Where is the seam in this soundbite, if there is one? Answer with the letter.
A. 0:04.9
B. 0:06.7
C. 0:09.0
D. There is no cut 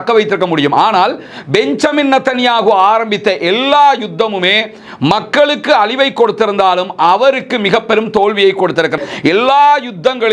C